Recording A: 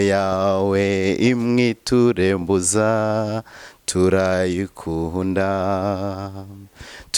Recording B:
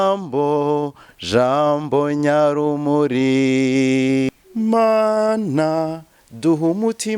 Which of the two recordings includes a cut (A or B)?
B